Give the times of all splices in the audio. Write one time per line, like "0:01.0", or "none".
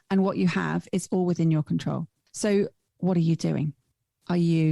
0:02.2
0:02.8

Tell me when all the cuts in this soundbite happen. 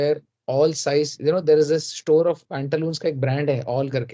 none

